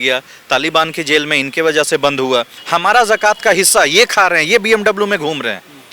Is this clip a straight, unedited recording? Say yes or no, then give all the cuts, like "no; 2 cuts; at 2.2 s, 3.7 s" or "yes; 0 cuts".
no; 1 cut; at 2.6 s